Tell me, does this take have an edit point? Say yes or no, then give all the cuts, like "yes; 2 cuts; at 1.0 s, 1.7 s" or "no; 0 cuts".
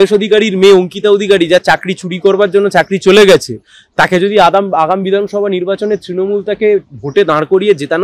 no; 0 cuts